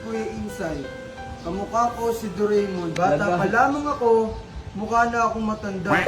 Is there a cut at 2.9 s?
yes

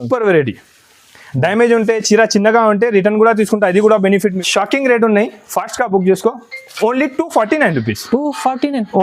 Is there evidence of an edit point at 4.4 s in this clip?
yes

